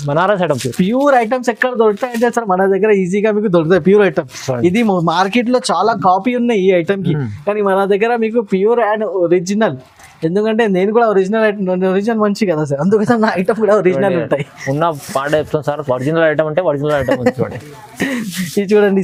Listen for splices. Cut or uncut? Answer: uncut